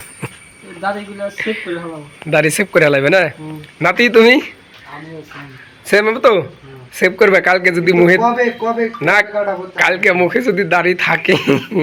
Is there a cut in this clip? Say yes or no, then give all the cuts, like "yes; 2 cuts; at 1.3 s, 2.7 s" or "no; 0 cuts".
no; 0 cuts